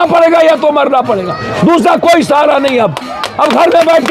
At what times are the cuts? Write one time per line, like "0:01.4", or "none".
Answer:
none